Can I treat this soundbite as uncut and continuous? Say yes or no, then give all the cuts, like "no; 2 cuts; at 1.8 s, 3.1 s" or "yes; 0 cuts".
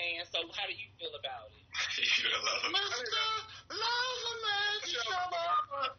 yes; 0 cuts